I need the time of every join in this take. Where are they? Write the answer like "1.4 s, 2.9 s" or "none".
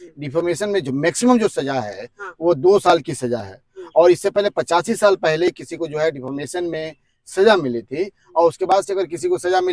none

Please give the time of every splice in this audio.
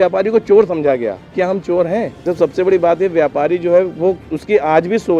2.2 s

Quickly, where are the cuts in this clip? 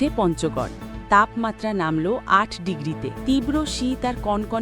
3.2 s

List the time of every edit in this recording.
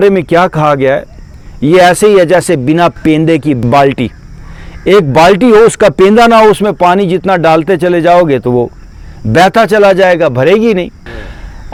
none

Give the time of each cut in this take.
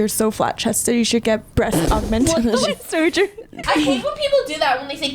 1.6 s, 3.6 s

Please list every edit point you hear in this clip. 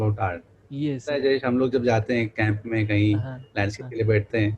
1.1 s

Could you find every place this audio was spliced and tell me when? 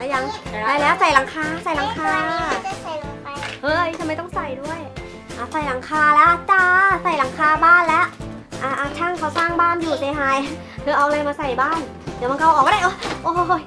none

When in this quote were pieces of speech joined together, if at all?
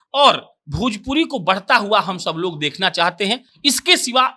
none

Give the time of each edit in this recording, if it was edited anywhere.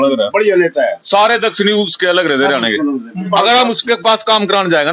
3.3 s

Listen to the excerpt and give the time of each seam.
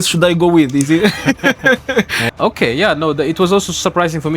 2.2 s

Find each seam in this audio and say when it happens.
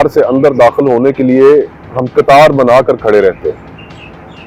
none

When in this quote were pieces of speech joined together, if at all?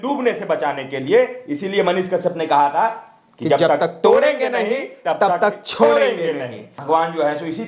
6.7 s

